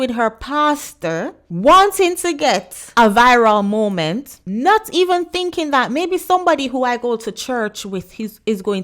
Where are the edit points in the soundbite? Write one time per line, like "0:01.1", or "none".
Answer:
0:01.4
0:02.8
0:04.3